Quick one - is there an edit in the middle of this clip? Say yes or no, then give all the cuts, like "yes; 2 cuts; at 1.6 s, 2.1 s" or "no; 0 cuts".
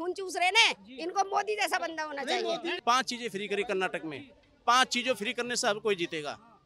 yes; 1 cut; at 2.8 s